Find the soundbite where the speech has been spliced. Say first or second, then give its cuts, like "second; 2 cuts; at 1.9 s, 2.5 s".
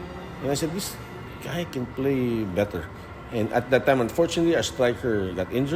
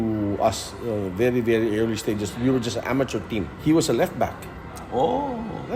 second; 1 cut; at 3.5 s